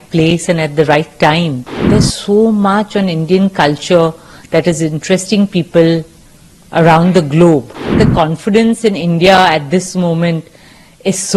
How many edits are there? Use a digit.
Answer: 2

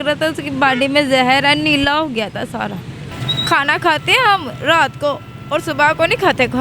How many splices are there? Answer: 1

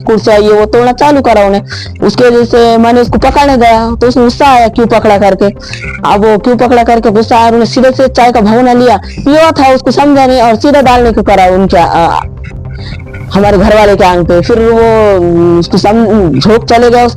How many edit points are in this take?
0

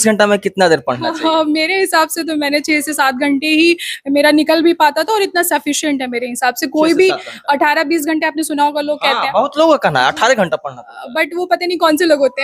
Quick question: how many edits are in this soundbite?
0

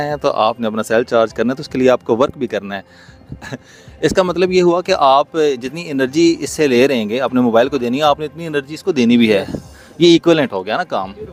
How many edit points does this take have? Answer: 0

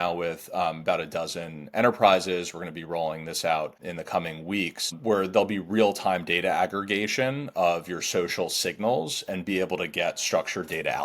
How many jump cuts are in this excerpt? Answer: 2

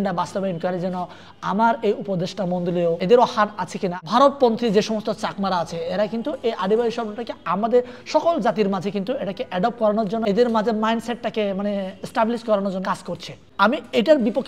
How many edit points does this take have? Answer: 4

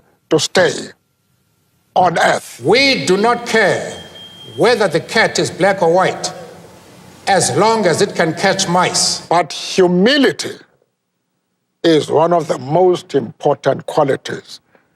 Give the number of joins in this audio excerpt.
2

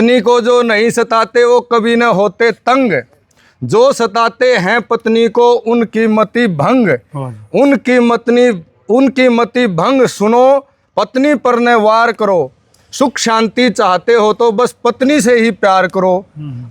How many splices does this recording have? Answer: 0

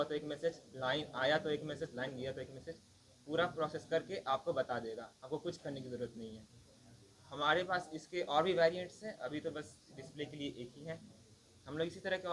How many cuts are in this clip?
0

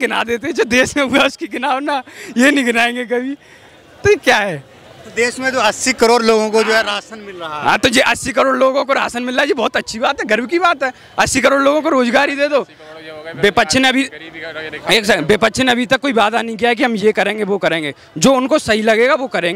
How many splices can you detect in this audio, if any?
0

